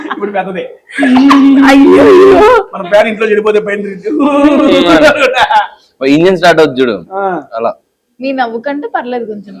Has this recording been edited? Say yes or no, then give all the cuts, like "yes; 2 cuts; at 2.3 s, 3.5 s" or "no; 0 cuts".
no; 0 cuts